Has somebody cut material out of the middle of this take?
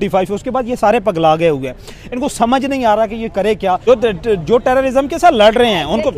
yes; 1 cut; at 3.8 s

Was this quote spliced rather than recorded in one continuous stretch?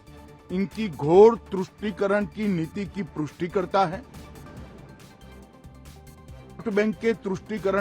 yes; 2 cuts; at 4.0 s, 6.6 s

